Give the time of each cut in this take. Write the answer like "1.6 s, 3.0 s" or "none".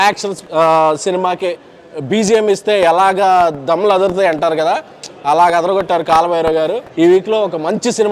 6.8 s